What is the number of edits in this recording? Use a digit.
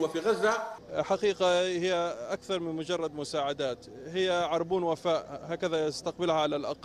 0